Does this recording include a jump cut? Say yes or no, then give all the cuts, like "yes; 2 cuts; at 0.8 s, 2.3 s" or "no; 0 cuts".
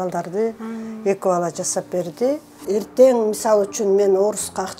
yes; 1 cut; at 2.6 s